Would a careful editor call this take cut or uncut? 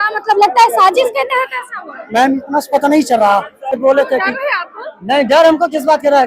cut